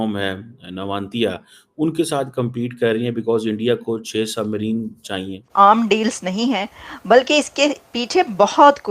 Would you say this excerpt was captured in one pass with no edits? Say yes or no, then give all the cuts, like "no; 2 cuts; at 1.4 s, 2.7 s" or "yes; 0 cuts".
no; 1 cut; at 5.5 s